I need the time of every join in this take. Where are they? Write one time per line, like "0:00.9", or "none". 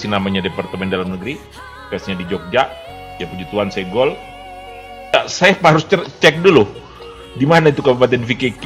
0:05.1